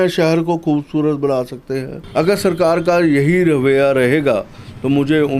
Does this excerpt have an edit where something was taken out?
yes; 1 cut; at 2.0 s

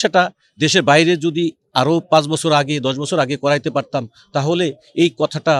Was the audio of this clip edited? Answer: no; 0 cuts

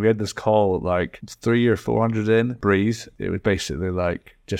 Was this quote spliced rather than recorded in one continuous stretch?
yes; 2 cuts; at 1.2 s, 3.0 s

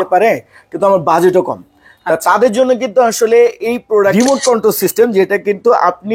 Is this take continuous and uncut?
no; 1 cut; at 4.1 s

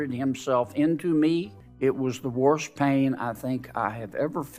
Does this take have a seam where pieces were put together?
yes; 1 cut; at 1.6 s

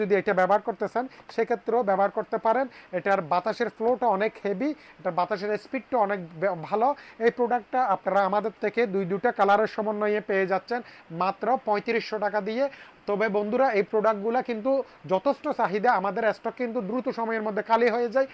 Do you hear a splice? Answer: no; 0 cuts

